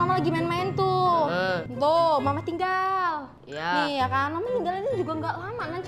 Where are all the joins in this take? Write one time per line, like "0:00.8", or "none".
0:01.7